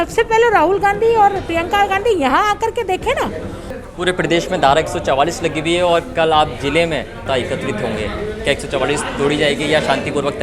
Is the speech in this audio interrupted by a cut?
yes; 2 cuts; at 3.7 s, 7.2 s

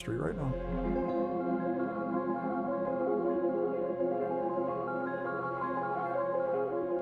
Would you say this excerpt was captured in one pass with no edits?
yes; 0 cuts

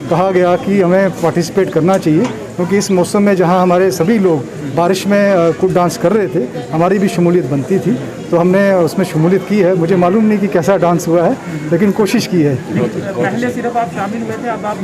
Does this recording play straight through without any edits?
yes; 0 cuts

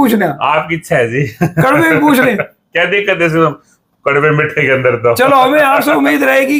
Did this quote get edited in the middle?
no; 0 cuts

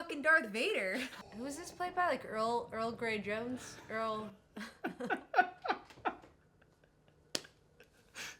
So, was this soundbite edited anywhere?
yes; 1 cut; at 1.1 s

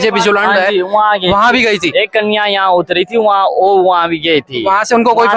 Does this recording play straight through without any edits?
yes; 0 cuts

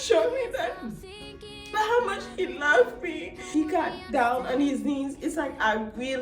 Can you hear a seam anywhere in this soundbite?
yes; 1 cut; at 3.4 s

